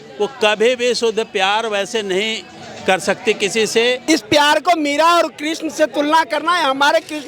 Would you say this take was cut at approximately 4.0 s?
yes; 1 cut; at 4.0 s

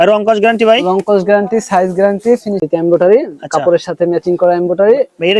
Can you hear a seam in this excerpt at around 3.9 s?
no; 1 cut; at 2.6 s

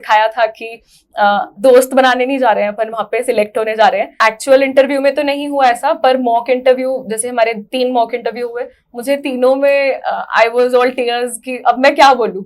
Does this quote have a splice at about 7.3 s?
no; 1 cut; at 4.1 s

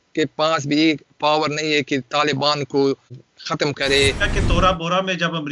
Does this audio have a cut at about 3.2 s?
yes; 2 cuts; at 3.2 s, 4.3 s

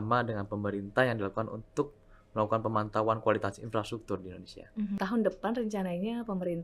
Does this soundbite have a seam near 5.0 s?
yes; 1 cut; at 5.0 s

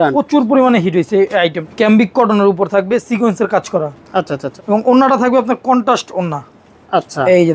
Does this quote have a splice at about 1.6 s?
yes; 2 cuts; at 1.6 s, 4.4 s

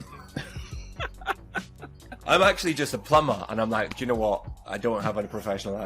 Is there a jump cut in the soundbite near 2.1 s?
yes; 1 cut; at 2.1 s

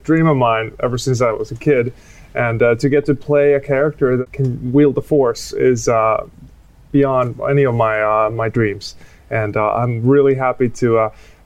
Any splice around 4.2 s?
yes; 1 cut; at 4.2 s

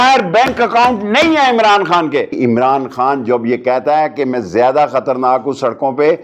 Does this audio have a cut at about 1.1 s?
no; 1 cut; at 2.3 s

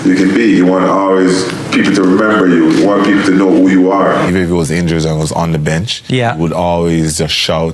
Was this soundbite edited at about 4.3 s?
yes; 1 cut; at 4.3 s

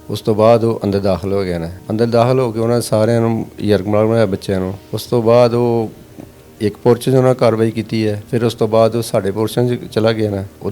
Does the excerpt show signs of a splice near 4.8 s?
no; 0 cuts

